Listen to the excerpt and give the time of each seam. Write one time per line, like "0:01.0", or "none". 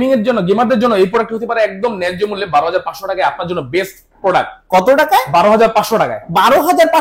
none